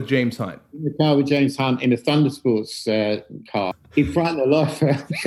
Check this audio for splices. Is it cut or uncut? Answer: cut